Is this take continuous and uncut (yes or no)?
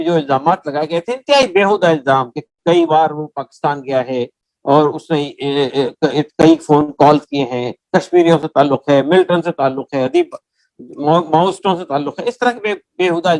yes